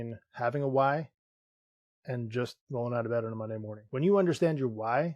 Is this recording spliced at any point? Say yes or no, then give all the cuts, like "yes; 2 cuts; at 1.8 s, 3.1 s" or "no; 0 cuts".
yes; 1 cut; at 3.8 s